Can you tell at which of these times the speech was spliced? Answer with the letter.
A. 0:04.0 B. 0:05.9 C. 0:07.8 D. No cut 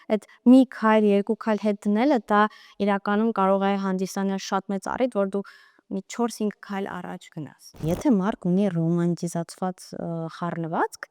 C